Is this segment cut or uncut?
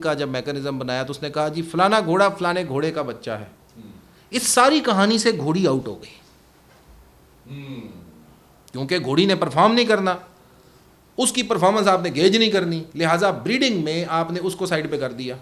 uncut